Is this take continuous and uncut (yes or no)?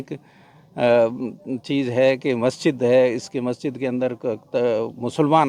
yes